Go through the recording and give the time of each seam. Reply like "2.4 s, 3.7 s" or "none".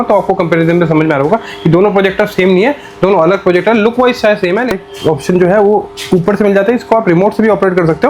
4.7 s